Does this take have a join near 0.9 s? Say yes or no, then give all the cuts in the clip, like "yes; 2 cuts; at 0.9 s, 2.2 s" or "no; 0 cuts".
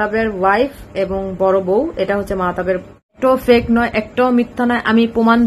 no; 1 cut; at 3.2 s